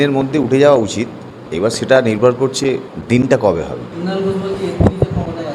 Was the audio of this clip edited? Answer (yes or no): no